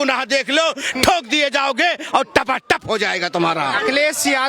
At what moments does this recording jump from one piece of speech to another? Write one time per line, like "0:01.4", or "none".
none